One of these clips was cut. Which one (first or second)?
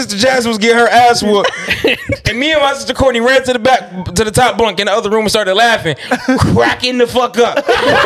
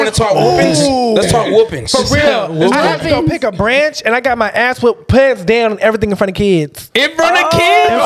second